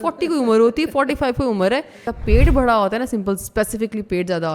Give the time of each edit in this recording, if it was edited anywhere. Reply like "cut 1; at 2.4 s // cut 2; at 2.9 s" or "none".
cut 1; at 2.0 s